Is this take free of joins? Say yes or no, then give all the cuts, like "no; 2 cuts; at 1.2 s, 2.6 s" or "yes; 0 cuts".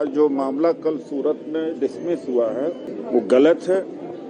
no; 1 cut; at 2.9 s